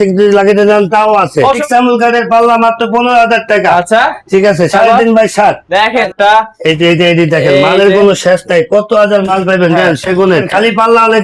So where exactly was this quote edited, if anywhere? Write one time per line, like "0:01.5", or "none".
0:01.6
0:06.0
0:10.5